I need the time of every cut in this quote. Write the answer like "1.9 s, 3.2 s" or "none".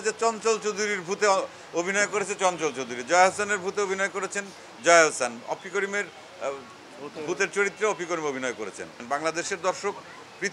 9.0 s